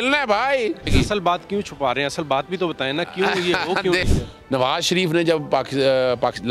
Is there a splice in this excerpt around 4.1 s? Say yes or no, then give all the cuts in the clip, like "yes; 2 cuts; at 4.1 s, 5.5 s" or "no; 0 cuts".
yes; 2 cuts; at 0.9 s, 4.1 s